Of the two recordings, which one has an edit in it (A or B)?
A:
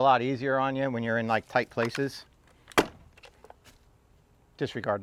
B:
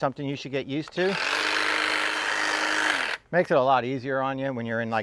B